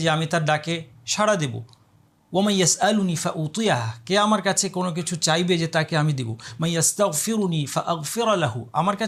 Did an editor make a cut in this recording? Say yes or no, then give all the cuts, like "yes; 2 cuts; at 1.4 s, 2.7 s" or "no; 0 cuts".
no; 0 cuts